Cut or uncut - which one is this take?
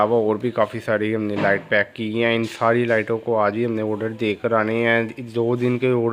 uncut